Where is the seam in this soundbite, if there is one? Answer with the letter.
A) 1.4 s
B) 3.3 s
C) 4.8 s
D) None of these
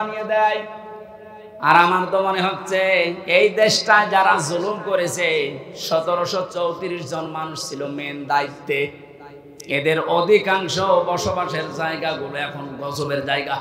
D